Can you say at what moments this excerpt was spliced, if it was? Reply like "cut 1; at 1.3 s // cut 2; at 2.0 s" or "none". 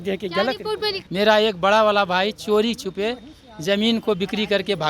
cut 1; at 1.0 s